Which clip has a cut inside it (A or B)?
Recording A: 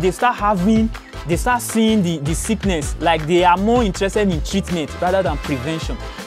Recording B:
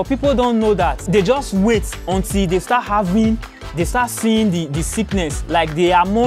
B